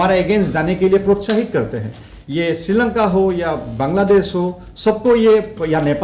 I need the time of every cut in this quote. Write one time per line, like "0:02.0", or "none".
none